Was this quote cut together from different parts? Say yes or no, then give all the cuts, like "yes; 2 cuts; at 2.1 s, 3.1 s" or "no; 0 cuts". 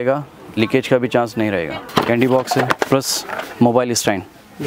yes; 2 cuts; at 1.8 s, 2.7 s